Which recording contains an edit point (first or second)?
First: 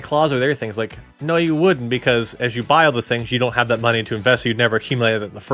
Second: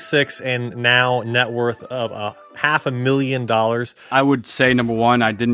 second